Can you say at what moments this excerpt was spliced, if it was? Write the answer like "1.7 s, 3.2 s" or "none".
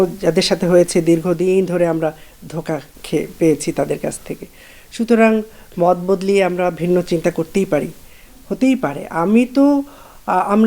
2.9 s